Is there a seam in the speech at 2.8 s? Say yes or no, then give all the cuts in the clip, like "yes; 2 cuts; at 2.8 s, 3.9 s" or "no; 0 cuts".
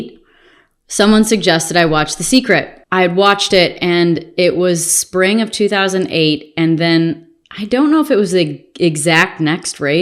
yes; 1 cut; at 2.8 s